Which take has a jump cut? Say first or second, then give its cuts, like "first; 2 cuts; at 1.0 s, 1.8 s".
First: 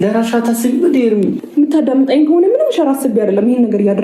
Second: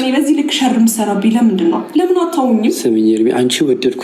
first; 1 cut; at 1.4 s